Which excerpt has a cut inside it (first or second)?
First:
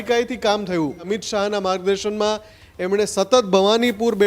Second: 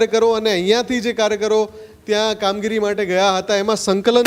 first